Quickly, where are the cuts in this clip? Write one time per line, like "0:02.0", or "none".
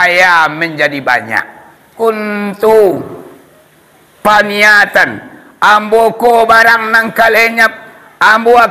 0:01.9